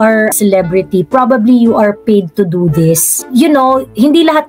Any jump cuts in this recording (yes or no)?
no